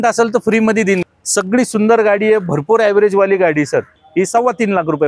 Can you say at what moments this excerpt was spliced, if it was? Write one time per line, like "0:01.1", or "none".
0:01.0
0:04.0